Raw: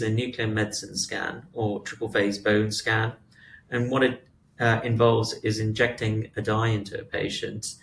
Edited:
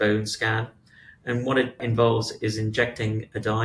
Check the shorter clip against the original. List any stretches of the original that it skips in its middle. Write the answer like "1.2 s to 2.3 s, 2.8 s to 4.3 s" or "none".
4.3 s to 4.8 s